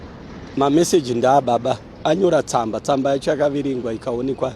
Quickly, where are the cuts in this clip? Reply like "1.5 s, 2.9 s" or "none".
1.9 s